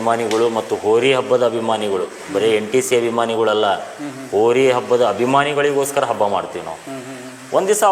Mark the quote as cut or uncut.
uncut